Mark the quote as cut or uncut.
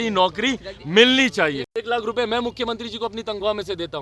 cut